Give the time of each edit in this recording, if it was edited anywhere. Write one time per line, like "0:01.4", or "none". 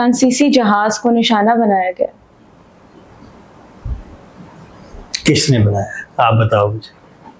none